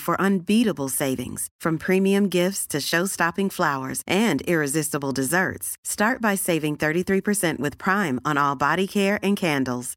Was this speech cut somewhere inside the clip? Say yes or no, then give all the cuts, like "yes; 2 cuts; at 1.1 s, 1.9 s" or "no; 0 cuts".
no; 0 cuts